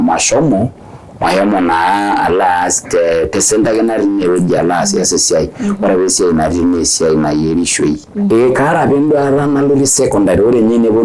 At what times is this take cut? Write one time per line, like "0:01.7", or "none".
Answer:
0:08.3